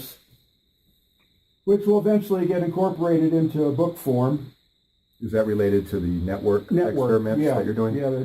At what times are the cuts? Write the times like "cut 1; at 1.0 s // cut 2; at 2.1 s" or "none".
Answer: cut 1; at 6.5 s